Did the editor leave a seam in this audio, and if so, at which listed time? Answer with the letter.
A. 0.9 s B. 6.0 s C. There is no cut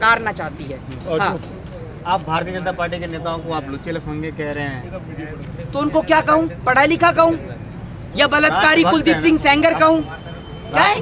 C